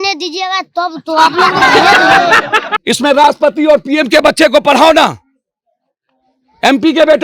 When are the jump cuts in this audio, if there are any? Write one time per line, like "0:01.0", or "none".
0:02.7